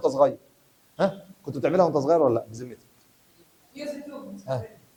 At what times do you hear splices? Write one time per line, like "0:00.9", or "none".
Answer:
none